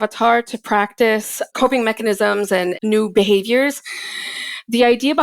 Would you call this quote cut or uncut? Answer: cut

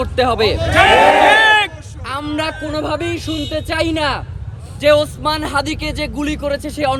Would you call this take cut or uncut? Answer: uncut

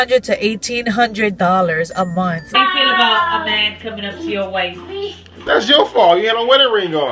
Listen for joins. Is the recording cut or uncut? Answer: cut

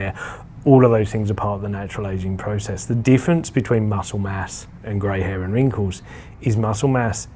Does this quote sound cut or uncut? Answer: uncut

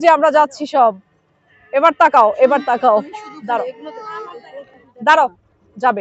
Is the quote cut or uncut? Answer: uncut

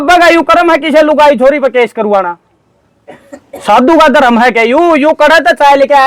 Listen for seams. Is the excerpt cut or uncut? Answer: uncut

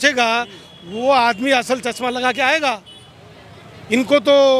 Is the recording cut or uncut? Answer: uncut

